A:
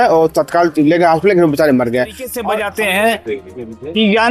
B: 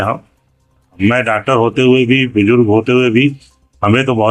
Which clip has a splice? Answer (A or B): A